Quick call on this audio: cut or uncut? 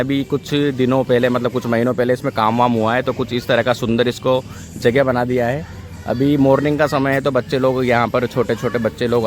uncut